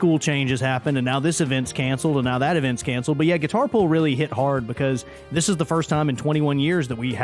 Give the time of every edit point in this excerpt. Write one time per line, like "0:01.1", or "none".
none